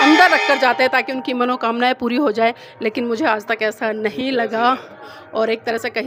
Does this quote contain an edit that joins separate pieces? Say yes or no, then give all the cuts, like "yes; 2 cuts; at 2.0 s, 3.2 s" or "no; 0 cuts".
no; 0 cuts